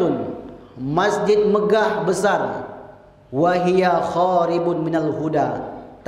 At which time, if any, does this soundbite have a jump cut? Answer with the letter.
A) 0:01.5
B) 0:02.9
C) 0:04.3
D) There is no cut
D